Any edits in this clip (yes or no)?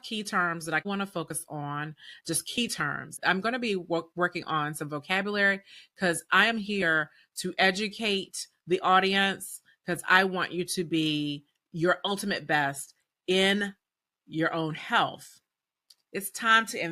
yes